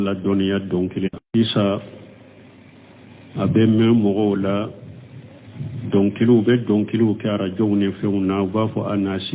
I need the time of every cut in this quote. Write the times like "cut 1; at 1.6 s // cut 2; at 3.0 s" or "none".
cut 1; at 1.3 s